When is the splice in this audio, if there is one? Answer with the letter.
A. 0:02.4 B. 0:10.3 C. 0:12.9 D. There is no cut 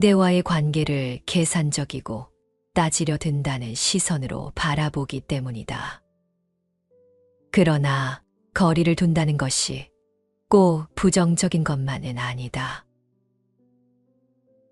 C